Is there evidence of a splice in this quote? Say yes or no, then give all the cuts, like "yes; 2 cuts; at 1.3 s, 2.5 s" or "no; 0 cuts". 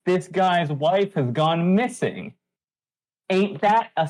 no; 0 cuts